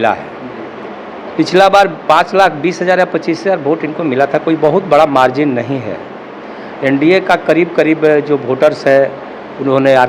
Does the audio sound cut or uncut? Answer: uncut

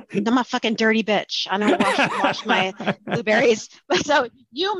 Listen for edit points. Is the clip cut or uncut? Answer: uncut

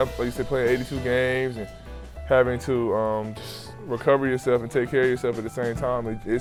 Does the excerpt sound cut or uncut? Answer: uncut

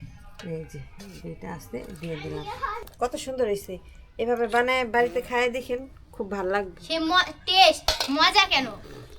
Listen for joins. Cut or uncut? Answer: cut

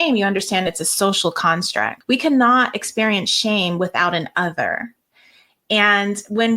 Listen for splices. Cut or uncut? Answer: cut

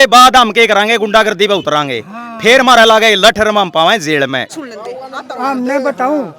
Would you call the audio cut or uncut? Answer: cut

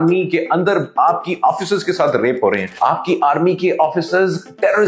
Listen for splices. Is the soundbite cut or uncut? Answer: cut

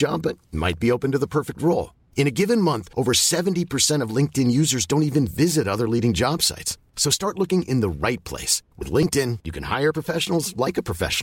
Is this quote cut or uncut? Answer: uncut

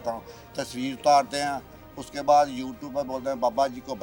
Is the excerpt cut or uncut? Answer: uncut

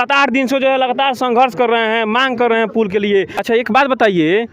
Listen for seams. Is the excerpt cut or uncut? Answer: cut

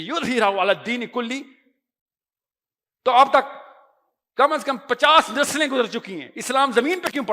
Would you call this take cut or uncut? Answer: uncut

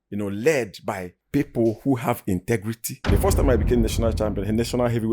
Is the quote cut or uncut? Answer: cut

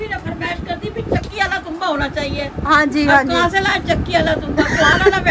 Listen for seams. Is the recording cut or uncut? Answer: uncut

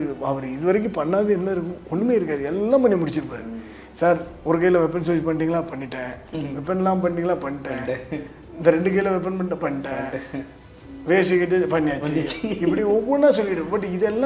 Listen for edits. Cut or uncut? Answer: uncut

